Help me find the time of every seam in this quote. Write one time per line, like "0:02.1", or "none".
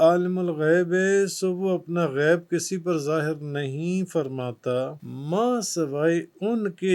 0:05.1